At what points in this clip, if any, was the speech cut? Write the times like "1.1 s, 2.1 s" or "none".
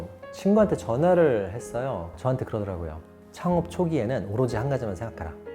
2.0 s